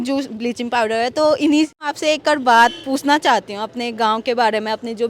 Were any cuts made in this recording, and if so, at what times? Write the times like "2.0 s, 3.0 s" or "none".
1.8 s